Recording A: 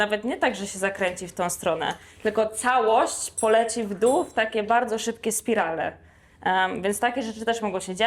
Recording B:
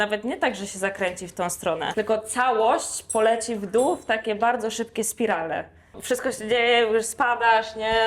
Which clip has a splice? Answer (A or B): B